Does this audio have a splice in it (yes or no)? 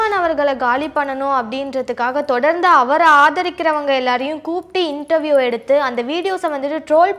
no